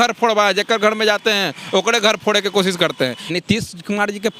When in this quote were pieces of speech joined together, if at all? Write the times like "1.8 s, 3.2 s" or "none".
3.3 s